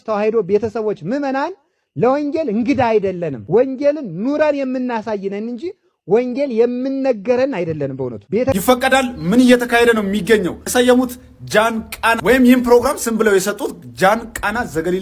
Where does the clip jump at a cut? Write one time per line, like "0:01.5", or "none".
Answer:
0:08.5